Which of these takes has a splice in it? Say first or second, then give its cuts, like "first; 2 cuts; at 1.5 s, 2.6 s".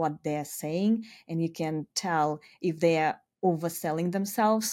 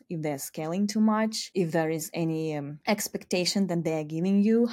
second; 2 cuts; at 1.4 s, 2.7 s